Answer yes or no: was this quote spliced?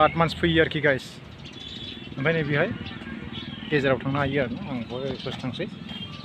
no